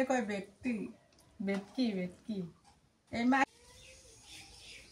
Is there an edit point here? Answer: yes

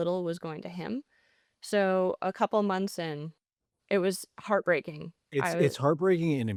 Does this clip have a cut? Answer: no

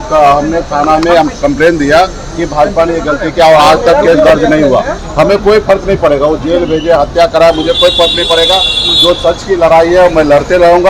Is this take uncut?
no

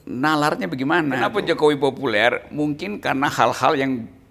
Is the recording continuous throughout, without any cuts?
no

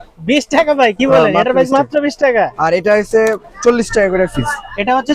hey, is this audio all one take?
yes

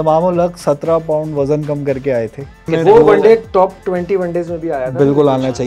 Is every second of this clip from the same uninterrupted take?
no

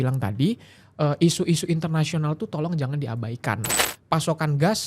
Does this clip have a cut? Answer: yes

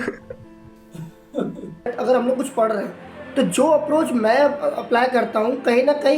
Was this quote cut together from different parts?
yes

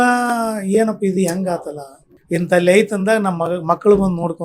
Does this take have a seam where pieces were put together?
yes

